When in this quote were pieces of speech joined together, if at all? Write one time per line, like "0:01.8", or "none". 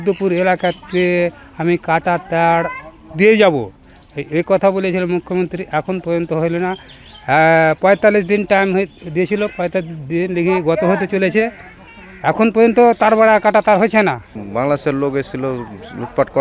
0:14.4